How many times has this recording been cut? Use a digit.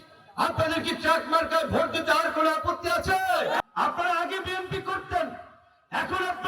1